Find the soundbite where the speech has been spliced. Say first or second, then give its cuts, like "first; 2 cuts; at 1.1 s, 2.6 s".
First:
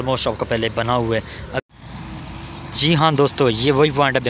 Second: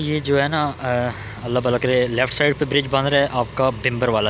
first; 1 cut; at 1.6 s